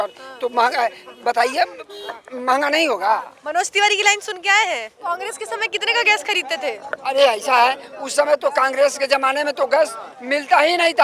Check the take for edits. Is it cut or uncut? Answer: cut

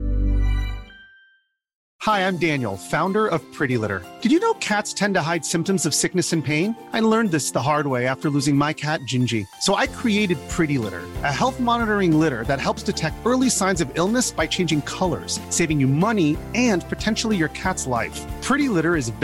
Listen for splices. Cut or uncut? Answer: cut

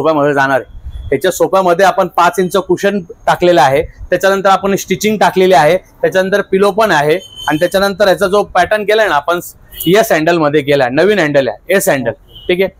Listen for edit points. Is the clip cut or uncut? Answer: uncut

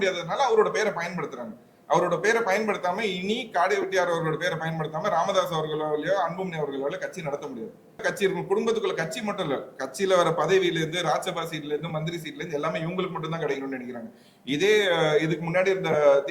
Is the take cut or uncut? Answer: cut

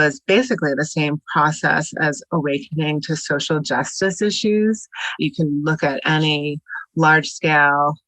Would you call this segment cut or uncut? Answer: cut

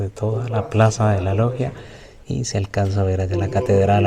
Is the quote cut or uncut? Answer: uncut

